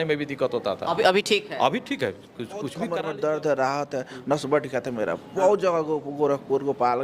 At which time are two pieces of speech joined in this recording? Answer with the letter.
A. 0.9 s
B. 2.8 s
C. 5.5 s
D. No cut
B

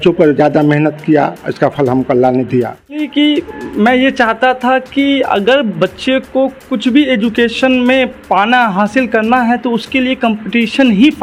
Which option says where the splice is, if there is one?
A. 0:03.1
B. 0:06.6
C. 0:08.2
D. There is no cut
A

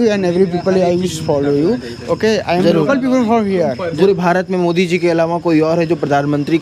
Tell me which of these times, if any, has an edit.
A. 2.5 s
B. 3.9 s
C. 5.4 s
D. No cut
B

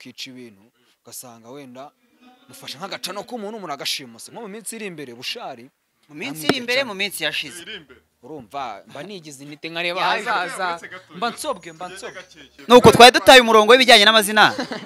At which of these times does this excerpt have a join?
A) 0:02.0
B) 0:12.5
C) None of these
B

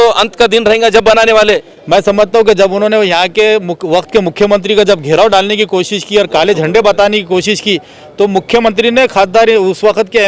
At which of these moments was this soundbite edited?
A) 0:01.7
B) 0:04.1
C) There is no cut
A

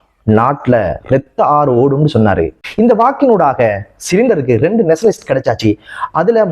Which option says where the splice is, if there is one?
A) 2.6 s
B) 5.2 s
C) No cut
A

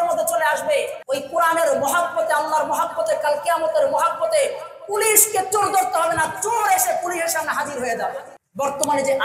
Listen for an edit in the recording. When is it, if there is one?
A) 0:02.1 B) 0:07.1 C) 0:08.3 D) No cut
C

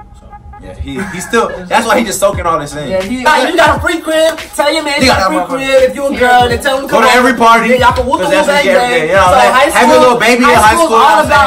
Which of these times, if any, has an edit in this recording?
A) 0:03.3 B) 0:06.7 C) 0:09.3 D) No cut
A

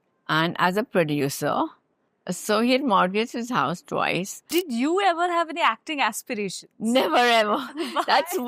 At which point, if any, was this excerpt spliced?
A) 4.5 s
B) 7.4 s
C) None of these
A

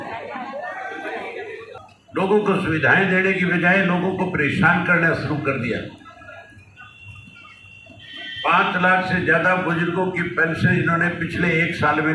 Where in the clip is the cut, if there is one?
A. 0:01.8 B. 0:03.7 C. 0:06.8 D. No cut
A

